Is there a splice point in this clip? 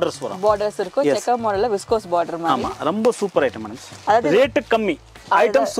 yes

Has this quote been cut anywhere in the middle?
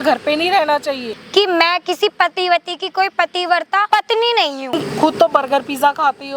yes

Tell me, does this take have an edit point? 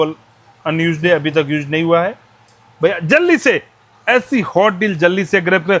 no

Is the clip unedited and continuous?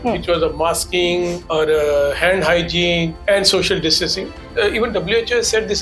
no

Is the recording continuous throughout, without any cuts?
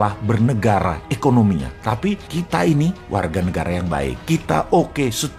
yes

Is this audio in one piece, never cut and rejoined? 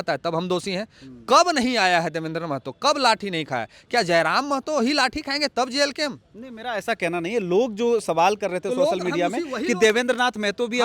yes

